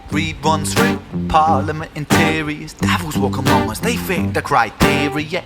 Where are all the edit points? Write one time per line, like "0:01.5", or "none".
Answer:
0:01.5